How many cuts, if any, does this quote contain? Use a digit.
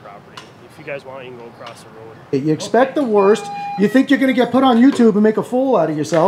1